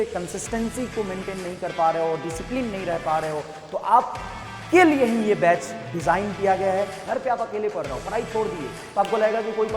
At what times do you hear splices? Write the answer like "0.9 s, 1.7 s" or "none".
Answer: 7.0 s